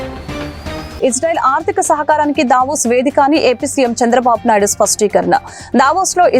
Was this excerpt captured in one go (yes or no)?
no